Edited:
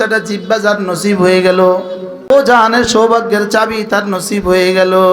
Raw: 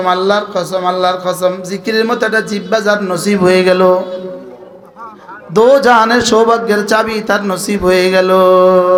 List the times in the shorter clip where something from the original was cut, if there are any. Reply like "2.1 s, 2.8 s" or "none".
2.3 s